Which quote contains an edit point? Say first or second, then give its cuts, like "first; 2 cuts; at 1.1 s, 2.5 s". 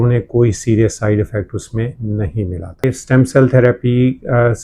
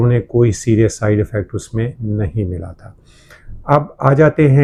first; 1 cut; at 3.0 s